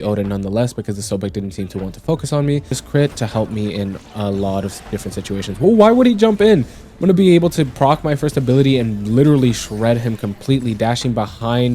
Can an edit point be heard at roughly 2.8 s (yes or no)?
yes